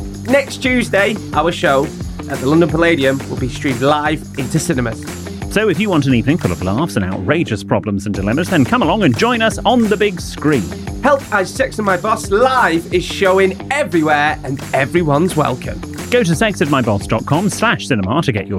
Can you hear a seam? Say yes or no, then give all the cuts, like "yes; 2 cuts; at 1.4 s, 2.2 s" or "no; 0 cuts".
no; 0 cuts